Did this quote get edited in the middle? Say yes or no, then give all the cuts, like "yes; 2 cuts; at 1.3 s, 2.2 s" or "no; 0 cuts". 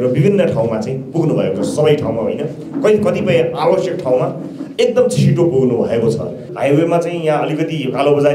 yes; 1 cut; at 6.5 s